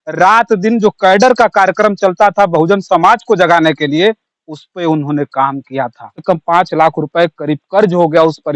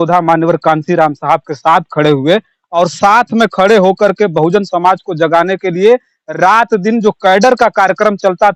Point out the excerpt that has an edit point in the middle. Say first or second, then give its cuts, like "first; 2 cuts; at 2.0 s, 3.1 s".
first; 1 cut; at 6.2 s